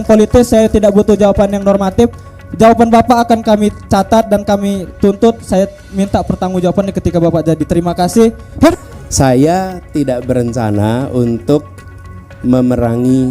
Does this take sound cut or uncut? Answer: cut